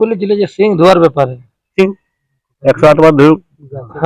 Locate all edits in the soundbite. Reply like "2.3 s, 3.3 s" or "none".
none